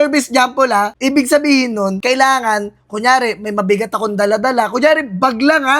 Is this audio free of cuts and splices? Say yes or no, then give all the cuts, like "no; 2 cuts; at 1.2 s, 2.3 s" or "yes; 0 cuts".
no; 2 cuts; at 0.9 s, 2.0 s